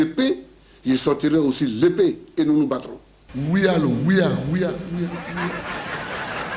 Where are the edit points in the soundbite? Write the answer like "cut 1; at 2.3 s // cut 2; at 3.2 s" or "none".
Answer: cut 1; at 3.3 s